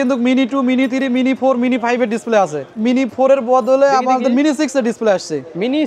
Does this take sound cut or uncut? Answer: cut